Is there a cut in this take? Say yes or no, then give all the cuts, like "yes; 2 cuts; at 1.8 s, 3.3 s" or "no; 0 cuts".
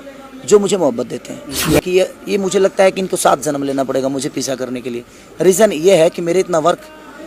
yes; 1 cut; at 1.7 s